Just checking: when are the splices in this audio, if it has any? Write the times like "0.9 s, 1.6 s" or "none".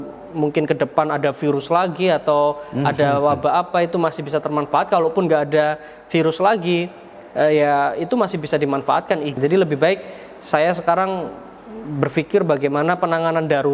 9.4 s